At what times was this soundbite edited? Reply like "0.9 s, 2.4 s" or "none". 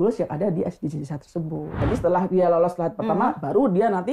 1.8 s

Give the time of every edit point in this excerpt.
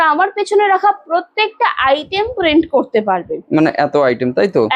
none

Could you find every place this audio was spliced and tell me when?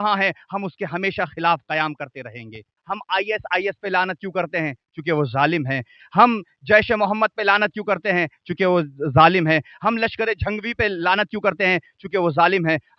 2.7 s

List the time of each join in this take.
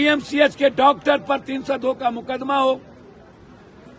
none

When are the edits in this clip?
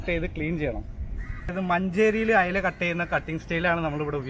1.5 s

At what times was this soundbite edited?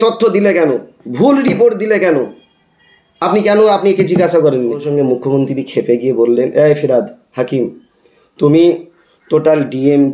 4.9 s

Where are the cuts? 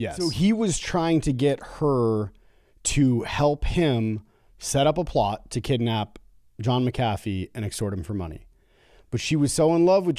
none

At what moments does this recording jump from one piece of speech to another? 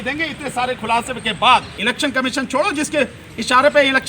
1.7 s

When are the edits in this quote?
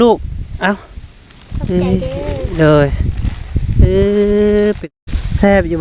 4.8 s

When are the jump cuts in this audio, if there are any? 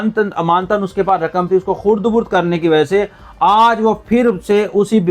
none

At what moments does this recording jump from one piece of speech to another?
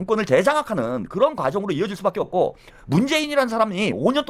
none

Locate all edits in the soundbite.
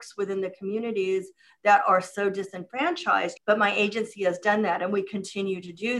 3.3 s

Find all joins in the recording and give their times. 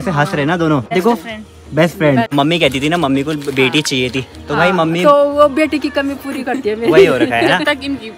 0.9 s, 2.3 s

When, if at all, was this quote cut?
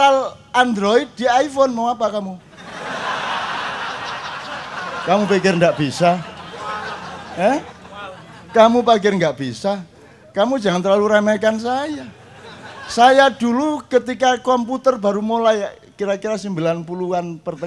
none

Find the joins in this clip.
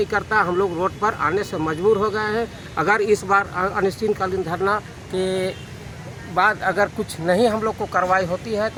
none

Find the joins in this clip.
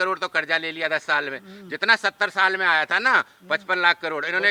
none

